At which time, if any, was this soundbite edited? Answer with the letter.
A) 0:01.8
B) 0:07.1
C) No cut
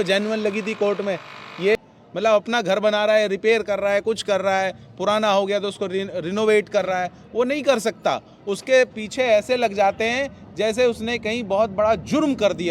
A